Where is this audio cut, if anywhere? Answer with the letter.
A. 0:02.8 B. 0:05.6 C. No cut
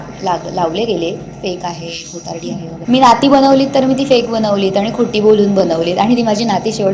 A